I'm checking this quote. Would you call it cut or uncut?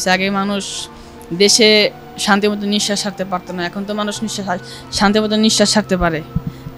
uncut